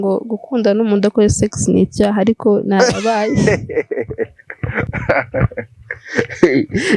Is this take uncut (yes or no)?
yes